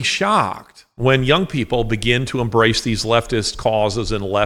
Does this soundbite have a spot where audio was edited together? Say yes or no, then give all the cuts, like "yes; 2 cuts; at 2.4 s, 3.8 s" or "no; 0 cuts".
yes; 1 cut; at 0.9 s